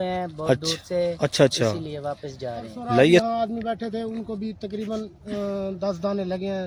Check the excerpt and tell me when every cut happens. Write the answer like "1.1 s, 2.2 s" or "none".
3.2 s